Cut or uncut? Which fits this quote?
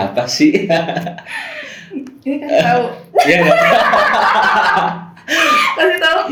uncut